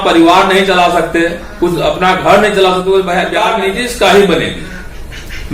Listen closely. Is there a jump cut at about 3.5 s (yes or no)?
yes